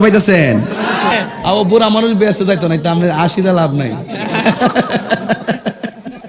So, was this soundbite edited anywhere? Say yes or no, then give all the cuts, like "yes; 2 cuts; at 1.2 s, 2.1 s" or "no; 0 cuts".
yes; 1 cut; at 1.1 s